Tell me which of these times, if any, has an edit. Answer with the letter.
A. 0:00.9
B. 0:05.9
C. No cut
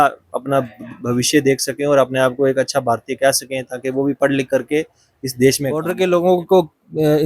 B